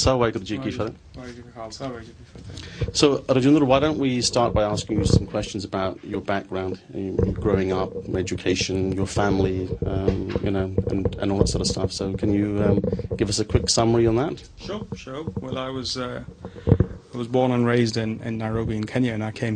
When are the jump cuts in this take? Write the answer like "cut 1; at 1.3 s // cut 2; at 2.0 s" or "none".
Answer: cut 1; at 4.0 s